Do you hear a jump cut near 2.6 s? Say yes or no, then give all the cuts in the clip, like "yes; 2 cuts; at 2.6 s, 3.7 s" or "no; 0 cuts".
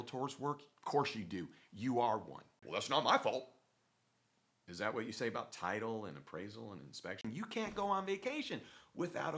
yes; 2 cuts; at 2.6 s, 7.2 s